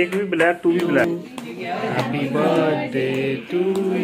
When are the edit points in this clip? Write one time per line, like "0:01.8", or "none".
0:01.0